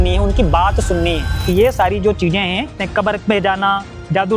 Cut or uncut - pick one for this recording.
cut